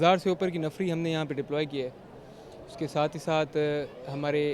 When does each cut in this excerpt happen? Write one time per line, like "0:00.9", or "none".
none